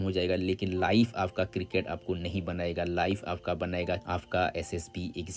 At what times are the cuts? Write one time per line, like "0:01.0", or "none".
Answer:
none

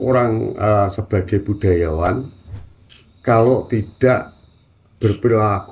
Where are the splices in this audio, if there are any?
none

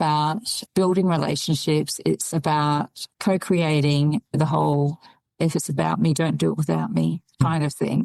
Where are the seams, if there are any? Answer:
none

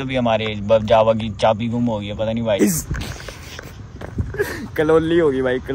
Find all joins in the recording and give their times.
0:02.6

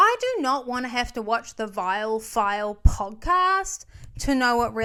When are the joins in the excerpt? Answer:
none

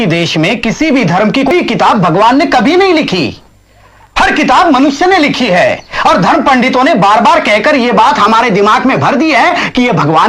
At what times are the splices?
0:01.5

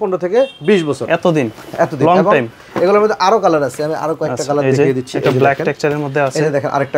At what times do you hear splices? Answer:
none

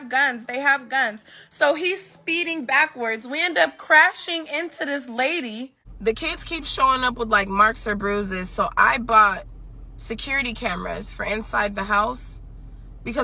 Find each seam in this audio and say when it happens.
0:05.8

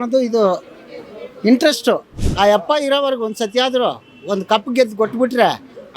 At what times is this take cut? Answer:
0:02.2

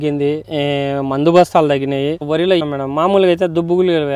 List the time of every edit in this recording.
0:02.3

